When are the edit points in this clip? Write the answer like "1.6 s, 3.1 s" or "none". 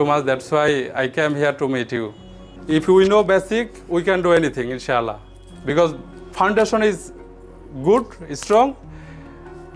2.1 s